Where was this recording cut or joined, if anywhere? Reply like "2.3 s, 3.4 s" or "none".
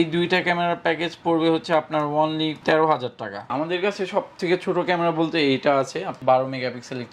3.5 s, 6.1 s

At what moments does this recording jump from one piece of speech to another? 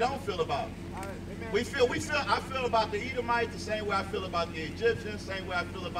none

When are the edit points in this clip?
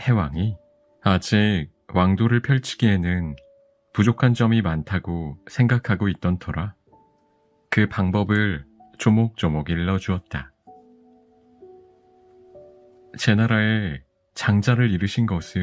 none

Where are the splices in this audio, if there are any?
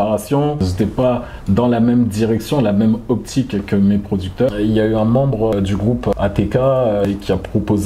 4.5 s

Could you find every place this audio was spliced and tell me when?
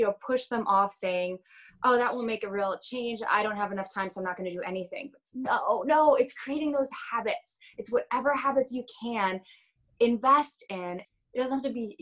11.0 s

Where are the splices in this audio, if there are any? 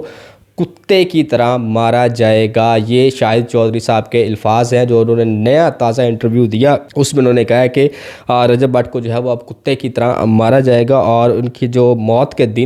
none

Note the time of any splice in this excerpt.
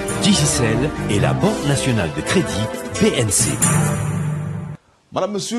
4.5 s

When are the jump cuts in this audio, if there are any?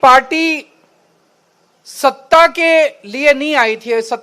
none

